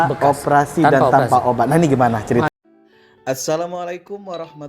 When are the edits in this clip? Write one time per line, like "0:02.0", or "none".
0:02.5